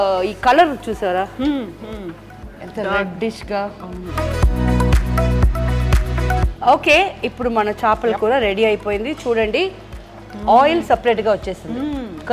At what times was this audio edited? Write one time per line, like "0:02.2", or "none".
none